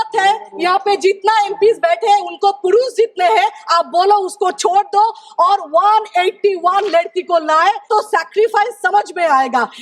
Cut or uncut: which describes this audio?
cut